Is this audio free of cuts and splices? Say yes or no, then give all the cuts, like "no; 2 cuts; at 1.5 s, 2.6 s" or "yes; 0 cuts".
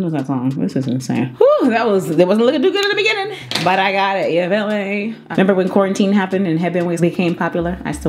no; 2 cuts; at 1.3 s, 5.2 s